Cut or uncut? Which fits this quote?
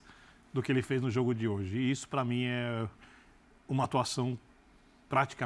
uncut